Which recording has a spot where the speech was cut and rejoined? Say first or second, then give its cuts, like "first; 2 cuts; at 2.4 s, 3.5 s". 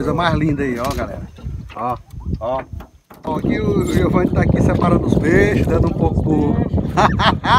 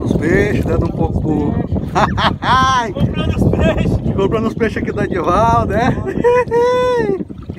first; 1 cut; at 3.1 s